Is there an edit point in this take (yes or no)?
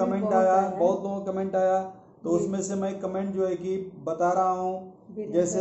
no